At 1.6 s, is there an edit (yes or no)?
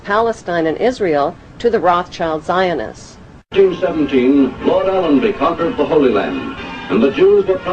yes